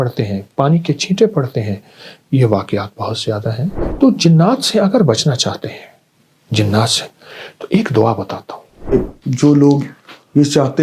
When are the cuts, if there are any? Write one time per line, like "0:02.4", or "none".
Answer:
0:03.8
0:08.9

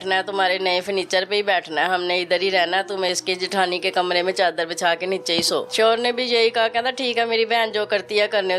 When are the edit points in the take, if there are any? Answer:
0:05.7

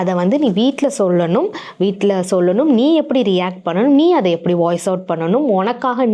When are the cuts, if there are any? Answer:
none

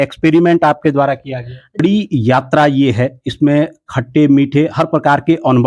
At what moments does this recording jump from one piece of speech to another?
0:01.8

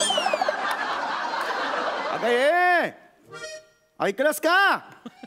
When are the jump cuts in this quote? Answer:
0:02.2

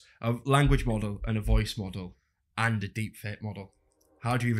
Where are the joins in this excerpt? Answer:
none

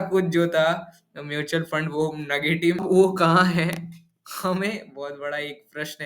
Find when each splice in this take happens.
0:02.8

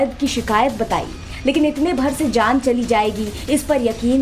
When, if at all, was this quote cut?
0:02.8

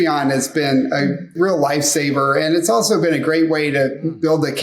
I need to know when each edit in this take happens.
0:01.3

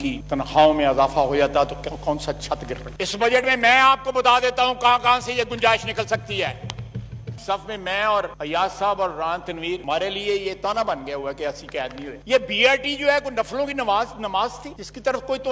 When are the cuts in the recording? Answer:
0:07.2
0:12.2

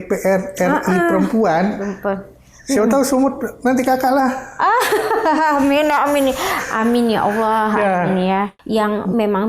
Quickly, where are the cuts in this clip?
0:08.5

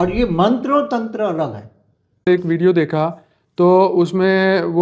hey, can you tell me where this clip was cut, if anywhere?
0:02.3

